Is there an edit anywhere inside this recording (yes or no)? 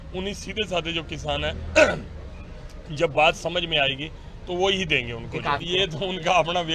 yes